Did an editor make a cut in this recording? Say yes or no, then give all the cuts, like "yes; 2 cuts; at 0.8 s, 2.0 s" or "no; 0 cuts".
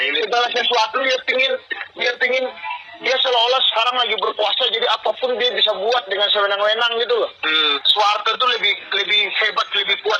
yes; 1 cut; at 7.7 s